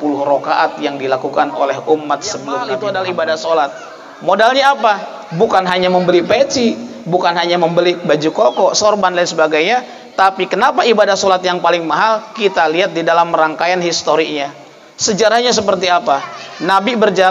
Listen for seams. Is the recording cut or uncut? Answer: cut